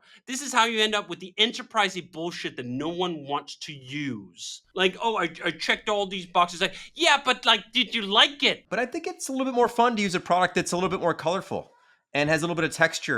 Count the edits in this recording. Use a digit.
2